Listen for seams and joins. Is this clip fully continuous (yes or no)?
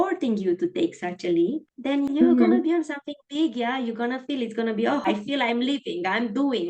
no